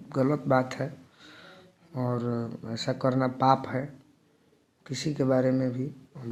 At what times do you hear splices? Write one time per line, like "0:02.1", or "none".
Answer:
none

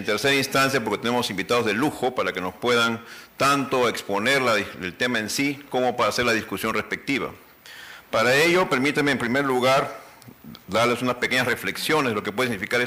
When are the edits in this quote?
0:07.3

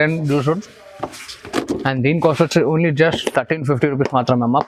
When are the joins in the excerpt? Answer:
none

